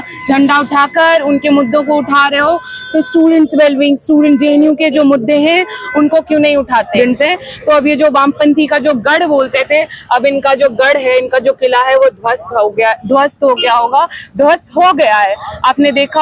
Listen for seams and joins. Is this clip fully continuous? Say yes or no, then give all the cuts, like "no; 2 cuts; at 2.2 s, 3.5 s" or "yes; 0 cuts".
no; 1 cut; at 7.0 s